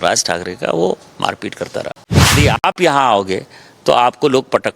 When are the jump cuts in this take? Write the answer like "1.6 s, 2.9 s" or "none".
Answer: 2.3 s

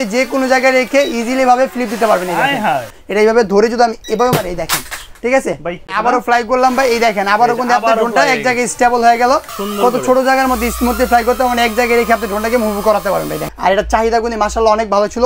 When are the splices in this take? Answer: 2.9 s, 6.0 s, 9.5 s, 13.5 s

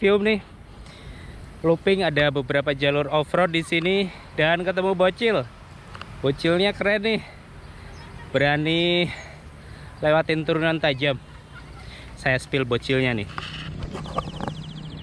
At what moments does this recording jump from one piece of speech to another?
none

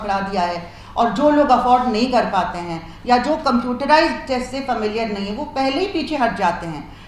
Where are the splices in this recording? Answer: none

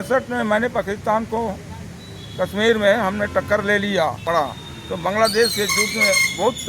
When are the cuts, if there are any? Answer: 4.2 s

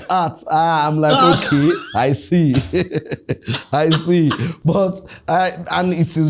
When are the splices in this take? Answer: none

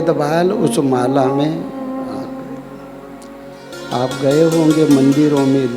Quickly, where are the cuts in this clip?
3.7 s

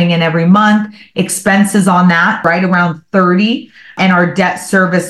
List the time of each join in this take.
2.4 s, 3.9 s

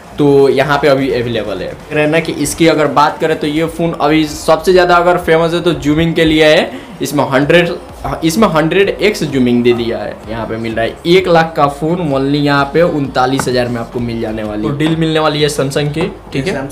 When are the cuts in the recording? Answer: 1.9 s, 10.3 s, 14.7 s

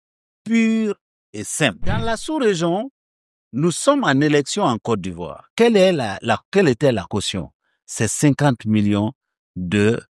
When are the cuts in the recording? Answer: 2.0 s

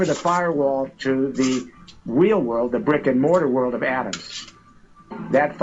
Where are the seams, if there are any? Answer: none

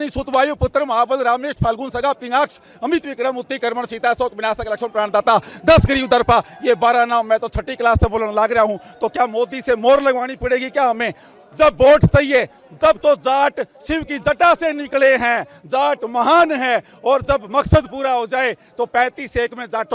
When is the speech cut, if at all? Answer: none

